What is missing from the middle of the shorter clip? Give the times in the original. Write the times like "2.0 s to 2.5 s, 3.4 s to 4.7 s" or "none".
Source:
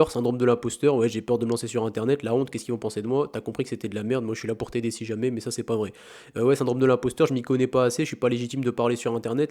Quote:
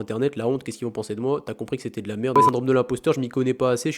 4.2 s to 6.5 s

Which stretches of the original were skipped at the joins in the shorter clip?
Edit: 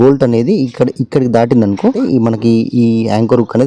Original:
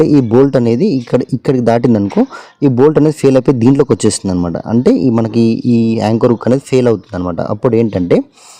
2.3 s to 4.9 s

